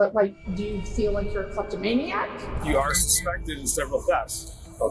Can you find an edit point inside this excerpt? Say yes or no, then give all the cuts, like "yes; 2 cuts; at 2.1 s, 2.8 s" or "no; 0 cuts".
yes; 1 cut; at 2.5 s